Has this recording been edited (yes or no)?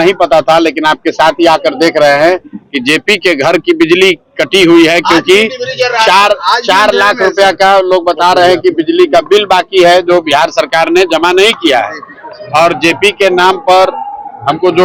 no